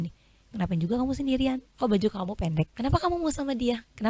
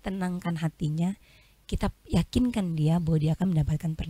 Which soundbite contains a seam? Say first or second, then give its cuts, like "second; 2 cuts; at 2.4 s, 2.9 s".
first; 2 cuts; at 1.7 s, 2.7 s